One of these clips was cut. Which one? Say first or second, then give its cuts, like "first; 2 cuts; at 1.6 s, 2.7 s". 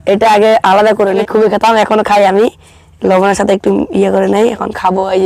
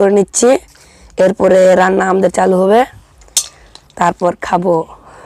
first; 1 cut; at 1.2 s